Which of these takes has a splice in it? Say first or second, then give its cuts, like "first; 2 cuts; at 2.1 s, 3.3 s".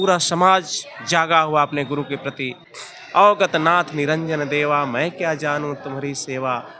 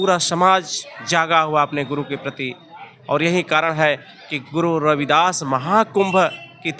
first; 1 cut; at 3.2 s